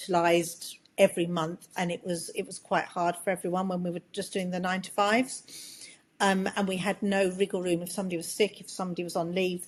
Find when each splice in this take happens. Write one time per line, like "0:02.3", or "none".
none